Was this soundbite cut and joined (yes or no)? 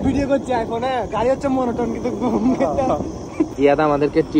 yes